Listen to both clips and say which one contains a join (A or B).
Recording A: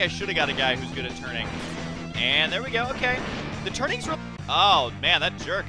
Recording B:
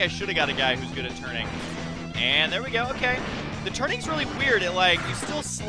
B